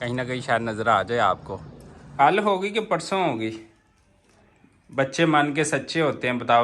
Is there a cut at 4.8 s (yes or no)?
no